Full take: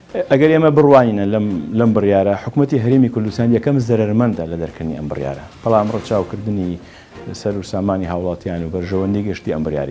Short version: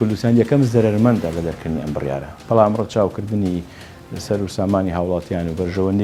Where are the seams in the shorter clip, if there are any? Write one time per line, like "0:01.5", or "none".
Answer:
none